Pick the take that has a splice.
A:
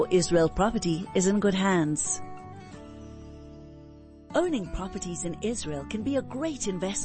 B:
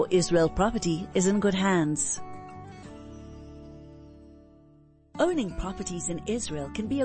A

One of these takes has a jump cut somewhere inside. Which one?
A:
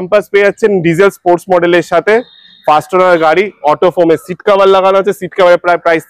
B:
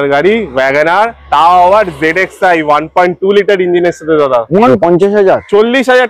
B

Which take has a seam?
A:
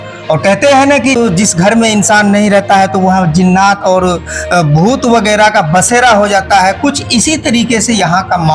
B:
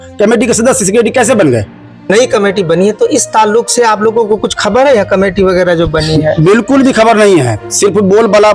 B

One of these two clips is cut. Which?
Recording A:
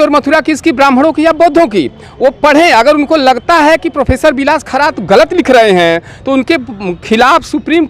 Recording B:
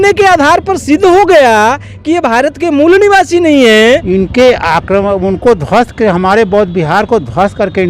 B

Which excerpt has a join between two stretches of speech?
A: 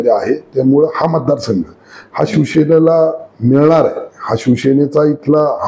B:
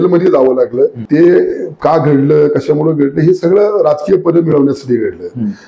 B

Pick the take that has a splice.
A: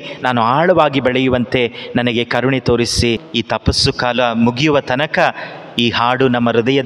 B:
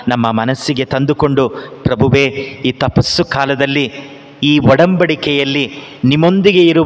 A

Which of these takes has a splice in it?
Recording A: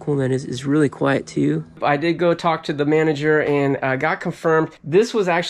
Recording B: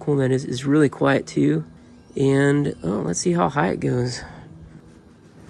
A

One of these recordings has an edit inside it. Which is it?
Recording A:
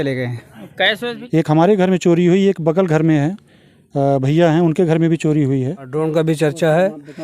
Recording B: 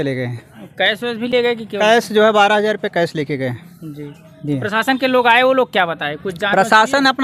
A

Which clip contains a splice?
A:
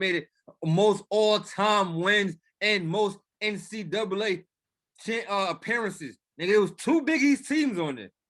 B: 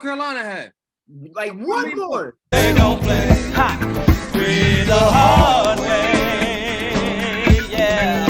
B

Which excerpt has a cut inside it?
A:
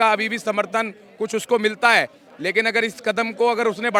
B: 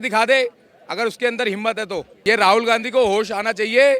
B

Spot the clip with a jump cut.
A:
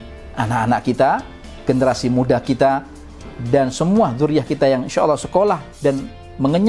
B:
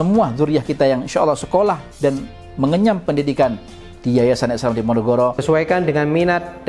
B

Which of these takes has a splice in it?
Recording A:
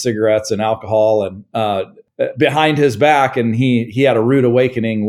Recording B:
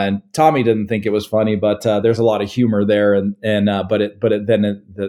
A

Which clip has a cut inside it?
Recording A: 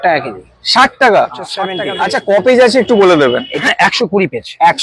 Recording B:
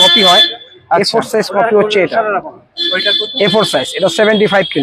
A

